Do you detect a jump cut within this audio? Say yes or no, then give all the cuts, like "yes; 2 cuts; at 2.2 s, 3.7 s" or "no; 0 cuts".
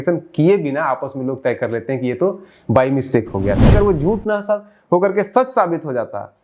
yes; 1 cut; at 3.7 s